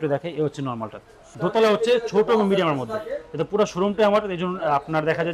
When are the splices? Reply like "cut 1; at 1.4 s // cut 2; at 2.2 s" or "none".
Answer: cut 1; at 1.2 s